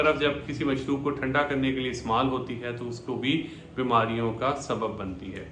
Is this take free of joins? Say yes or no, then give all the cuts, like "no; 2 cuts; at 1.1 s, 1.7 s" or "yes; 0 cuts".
yes; 0 cuts